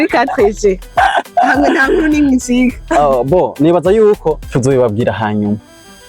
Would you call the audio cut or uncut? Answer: cut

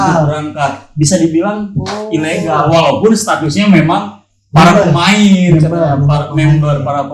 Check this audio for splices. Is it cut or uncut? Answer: uncut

